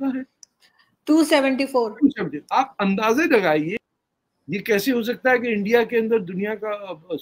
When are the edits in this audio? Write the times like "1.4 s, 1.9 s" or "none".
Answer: 3.8 s